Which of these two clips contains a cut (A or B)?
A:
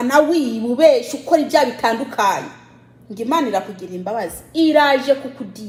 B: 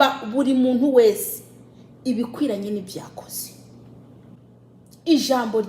B